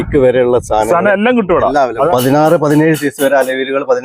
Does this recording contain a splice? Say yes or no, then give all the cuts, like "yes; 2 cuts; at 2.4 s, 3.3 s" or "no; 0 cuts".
yes; 1 cut; at 2.1 s